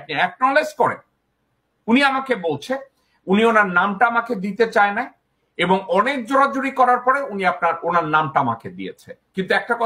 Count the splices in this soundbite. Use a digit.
0